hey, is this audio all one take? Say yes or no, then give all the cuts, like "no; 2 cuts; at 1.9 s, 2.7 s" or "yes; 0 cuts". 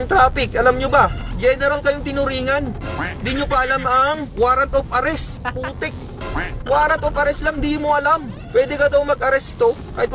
no; 3 cuts; at 1.2 s, 5.3 s, 8.3 s